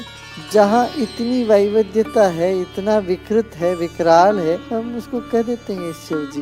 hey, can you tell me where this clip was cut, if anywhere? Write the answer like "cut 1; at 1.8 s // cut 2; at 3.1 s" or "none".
cut 1; at 4.6 s